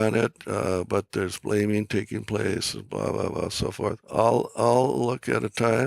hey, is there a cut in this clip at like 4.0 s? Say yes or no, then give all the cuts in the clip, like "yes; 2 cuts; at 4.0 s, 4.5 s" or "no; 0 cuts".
yes; 1 cut; at 4.0 s